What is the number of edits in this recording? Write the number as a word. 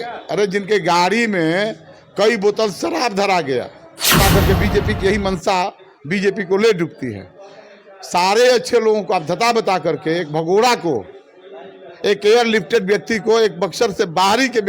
one